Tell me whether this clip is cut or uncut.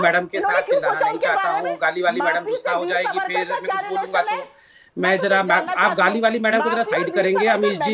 uncut